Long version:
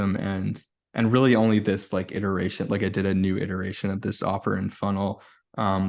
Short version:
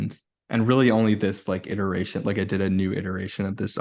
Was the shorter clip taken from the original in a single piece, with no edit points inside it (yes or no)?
yes